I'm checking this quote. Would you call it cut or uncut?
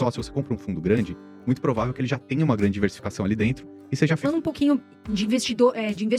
cut